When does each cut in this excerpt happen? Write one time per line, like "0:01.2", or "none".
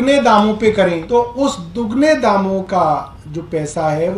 0:01.0